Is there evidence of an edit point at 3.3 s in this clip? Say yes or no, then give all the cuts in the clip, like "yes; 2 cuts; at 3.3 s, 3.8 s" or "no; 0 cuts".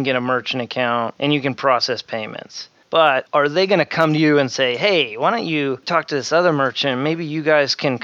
no; 2 cuts; at 1.1 s, 5.8 s